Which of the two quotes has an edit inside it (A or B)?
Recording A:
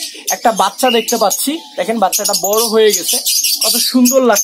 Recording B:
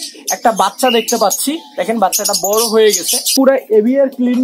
B